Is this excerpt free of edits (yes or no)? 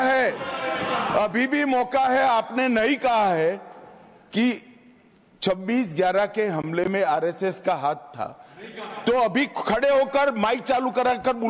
yes